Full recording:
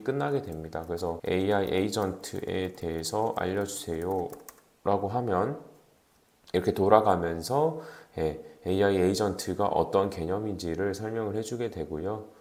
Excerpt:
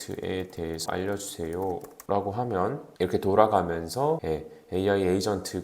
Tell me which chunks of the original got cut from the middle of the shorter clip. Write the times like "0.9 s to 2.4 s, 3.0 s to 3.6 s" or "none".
3.1 s to 3.3 s, 4.4 s to 4.7 s, 5.6 s to 6.4 s, 7.8 s to 8.2 s